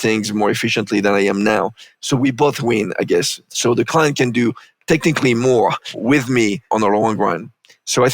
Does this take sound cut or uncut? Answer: cut